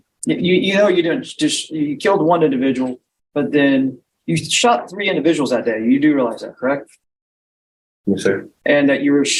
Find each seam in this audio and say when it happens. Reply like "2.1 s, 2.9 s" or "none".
none

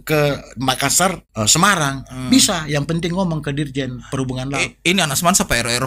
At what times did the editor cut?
1.2 s

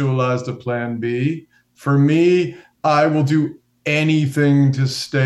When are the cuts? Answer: 2.6 s

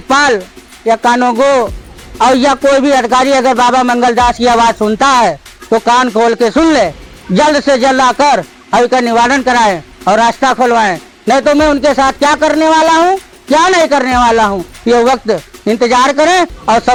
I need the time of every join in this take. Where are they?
none

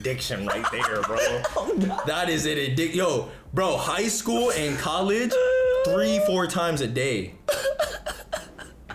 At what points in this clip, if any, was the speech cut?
none

